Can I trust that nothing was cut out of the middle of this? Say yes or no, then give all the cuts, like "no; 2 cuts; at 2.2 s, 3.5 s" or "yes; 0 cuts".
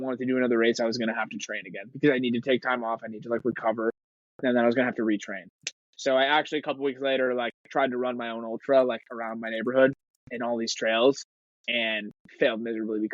yes; 0 cuts